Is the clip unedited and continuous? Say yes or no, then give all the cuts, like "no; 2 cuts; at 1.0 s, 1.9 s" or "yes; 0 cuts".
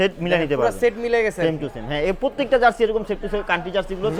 yes; 0 cuts